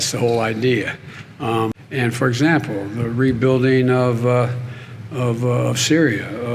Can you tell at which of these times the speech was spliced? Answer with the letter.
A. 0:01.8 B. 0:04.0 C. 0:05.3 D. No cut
A